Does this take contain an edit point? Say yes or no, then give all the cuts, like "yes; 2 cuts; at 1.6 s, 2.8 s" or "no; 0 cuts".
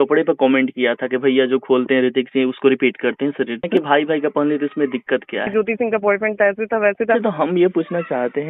yes; 3 cuts; at 3.6 s, 5.5 s, 7.2 s